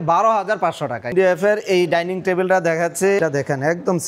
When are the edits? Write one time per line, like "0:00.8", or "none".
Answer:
0:01.1
0:03.2